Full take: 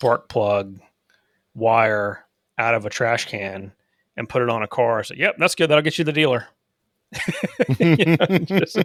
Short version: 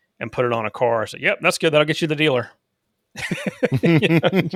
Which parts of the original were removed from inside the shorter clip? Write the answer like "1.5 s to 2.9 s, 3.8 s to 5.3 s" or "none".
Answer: none